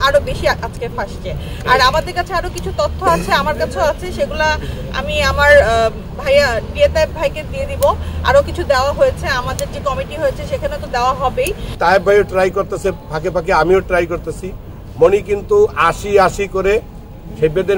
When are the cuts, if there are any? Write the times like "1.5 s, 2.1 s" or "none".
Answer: 11.8 s